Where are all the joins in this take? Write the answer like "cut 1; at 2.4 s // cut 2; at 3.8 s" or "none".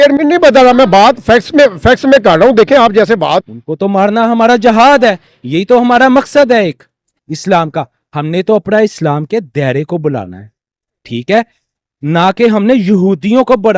cut 1; at 3.4 s